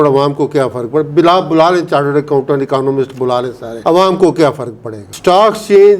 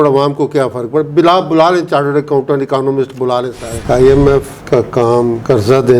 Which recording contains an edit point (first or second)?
second